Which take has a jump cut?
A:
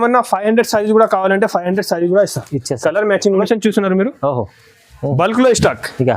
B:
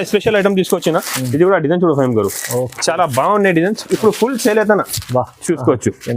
A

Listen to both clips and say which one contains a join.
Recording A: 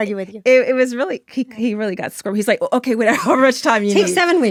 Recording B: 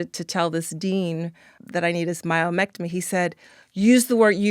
B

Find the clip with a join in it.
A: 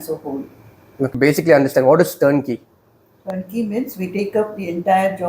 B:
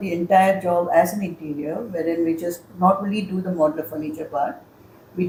A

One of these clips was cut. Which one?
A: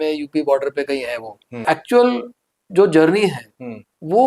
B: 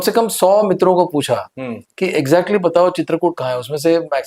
A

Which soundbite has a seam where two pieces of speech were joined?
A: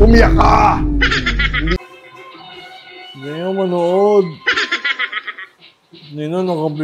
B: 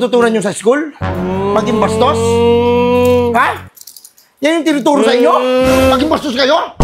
A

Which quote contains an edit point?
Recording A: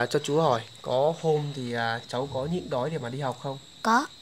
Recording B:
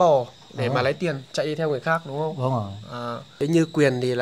B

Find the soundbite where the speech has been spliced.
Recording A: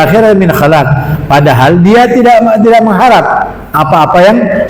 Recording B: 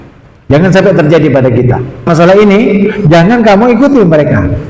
B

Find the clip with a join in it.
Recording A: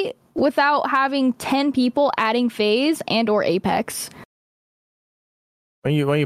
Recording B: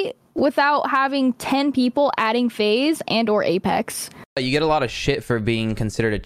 B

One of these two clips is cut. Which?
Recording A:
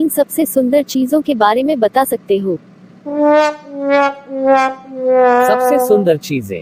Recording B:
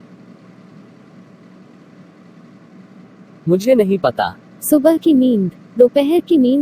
B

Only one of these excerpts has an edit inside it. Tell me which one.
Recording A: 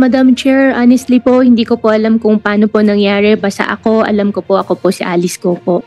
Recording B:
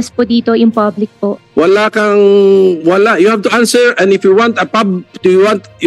B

